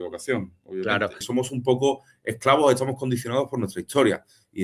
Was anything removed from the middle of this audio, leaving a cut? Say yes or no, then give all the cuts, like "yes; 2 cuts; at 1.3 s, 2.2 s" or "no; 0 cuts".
yes; 1 cut; at 1.2 s